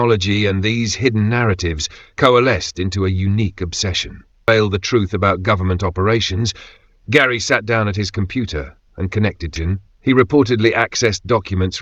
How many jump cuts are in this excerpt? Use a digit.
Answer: 2